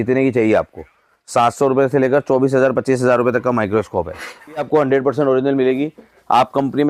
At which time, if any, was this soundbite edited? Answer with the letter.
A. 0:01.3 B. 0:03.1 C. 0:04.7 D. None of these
C